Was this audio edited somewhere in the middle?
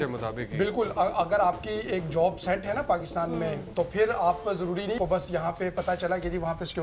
yes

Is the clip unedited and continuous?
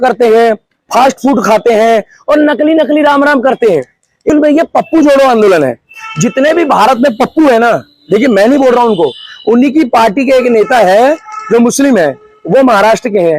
no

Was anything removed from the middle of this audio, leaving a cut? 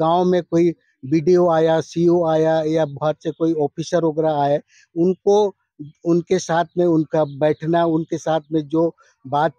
no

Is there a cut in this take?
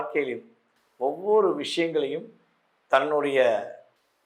no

